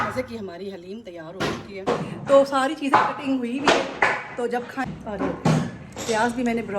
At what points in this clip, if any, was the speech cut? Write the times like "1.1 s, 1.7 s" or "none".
1.9 s, 4.9 s